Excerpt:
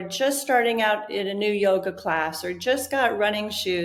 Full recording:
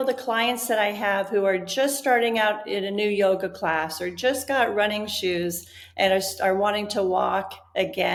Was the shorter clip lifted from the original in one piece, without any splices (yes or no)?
yes